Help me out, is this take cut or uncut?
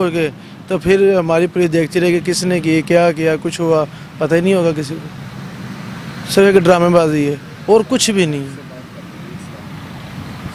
uncut